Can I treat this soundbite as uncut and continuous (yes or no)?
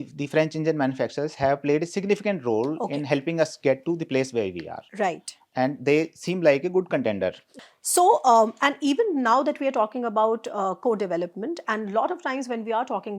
yes